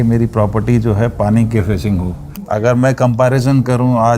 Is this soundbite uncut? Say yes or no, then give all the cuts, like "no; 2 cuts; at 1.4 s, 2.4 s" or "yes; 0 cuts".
no; 1 cut; at 2.3 s